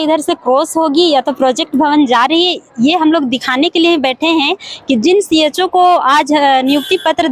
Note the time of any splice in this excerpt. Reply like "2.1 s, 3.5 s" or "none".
none